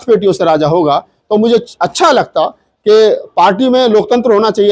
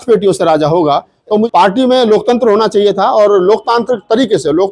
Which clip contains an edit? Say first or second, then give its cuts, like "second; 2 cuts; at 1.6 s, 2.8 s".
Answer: second; 1 cut; at 1.5 s